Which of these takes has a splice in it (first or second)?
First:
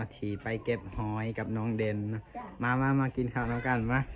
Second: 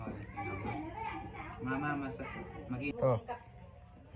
second